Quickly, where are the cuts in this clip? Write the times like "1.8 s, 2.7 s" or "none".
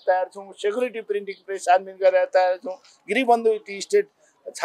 none